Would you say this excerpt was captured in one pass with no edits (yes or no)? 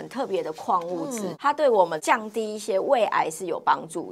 yes